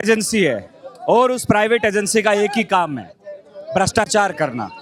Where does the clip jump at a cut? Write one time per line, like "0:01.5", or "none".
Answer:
none